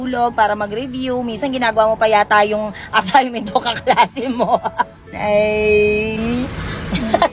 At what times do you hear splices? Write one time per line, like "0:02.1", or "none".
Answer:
0:05.2